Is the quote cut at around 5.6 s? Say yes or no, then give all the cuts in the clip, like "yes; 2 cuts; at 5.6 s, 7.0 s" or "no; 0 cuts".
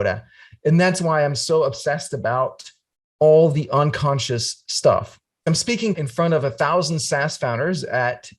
yes; 1 cut; at 5.6 s